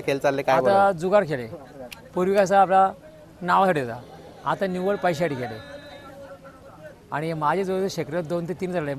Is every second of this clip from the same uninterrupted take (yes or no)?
yes